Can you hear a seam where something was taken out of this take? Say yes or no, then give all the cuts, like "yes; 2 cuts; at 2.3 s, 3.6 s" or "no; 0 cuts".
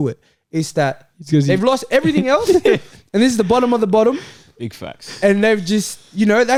no; 0 cuts